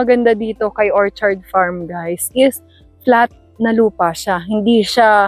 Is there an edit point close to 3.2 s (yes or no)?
no